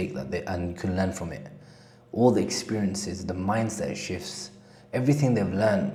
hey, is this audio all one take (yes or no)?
yes